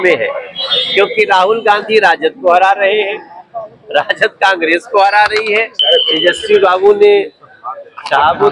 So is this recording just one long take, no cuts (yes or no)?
no